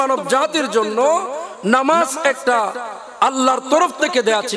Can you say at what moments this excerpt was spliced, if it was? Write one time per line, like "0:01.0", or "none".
none